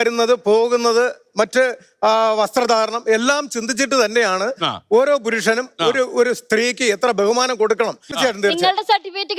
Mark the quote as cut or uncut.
cut